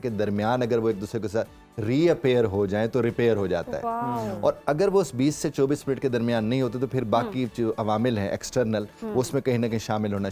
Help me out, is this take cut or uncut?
uncut